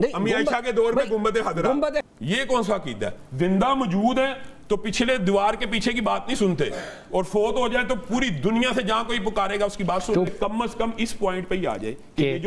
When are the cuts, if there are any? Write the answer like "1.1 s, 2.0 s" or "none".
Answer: 2.0 s, 10.3 s

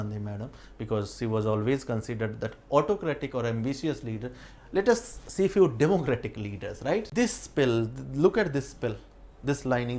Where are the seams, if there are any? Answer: 7.1 s

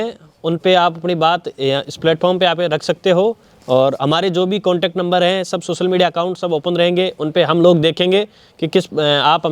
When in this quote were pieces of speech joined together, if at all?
none

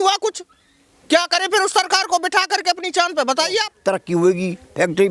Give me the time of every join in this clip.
3.7 s

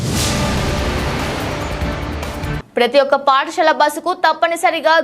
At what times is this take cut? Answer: 2.5 s

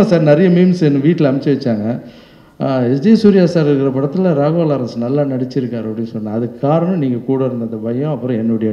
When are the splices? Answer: none

